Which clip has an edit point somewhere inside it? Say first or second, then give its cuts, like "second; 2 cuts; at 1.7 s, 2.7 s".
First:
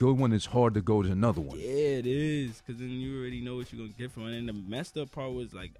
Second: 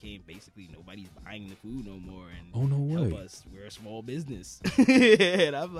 first; 1 cut; at 4.1 s